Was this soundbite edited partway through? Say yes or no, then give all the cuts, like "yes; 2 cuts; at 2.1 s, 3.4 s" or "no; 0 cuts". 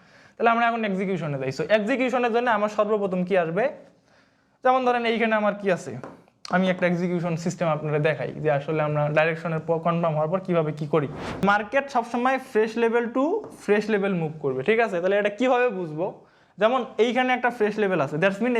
yes; 1 cut; at 11.4 s